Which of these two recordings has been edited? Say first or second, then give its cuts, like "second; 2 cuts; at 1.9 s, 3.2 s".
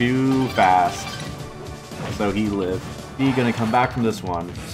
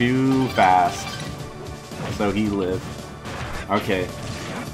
second; 1 cut; at 3.0 s